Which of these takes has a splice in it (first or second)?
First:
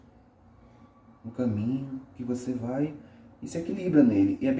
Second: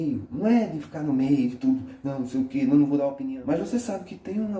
second